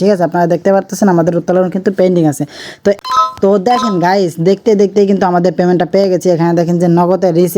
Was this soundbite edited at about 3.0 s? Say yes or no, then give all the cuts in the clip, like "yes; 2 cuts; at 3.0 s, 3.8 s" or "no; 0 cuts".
yes; 1 cut; at 3.0 s